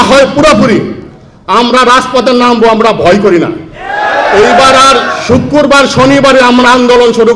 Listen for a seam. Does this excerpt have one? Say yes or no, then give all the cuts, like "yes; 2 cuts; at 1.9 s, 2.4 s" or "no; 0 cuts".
no; 0 cuts